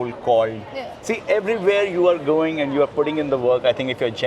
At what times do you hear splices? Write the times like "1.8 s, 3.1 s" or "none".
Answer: 1.1 s